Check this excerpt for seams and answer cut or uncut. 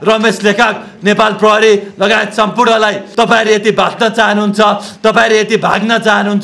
cut